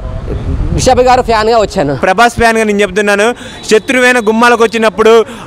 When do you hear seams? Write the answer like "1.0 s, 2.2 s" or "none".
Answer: 2.0 s